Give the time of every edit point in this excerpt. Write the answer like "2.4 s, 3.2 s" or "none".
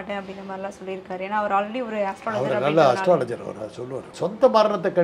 4.1 s